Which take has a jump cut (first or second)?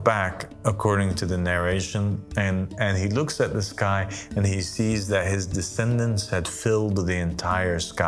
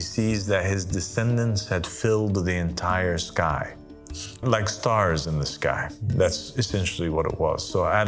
second